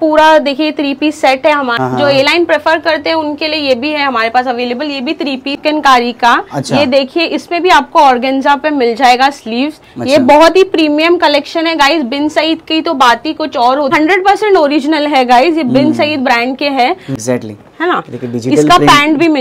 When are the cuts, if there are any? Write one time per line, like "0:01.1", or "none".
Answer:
0:01.7
0:05.6
0:13.9
0:17.1